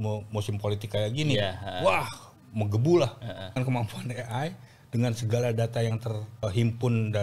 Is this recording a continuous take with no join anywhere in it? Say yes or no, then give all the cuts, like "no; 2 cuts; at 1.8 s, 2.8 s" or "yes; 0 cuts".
no; 2 cuts; at 3.4 s, 6.4 s